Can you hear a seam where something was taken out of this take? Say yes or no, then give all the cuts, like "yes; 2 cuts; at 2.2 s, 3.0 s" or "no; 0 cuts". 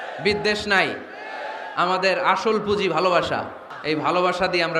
yes; 1 cut; at 3.7 s